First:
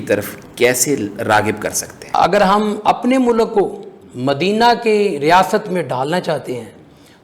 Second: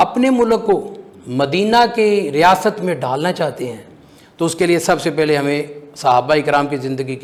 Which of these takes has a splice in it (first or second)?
first